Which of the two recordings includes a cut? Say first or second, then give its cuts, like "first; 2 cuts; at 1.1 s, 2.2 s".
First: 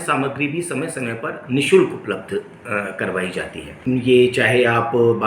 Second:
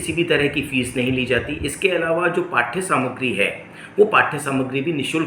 first; 1 cut; at 3.7 s